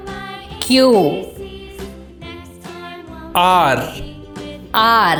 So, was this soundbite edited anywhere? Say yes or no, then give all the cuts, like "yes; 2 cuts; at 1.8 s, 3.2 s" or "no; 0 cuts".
no; 0 cuts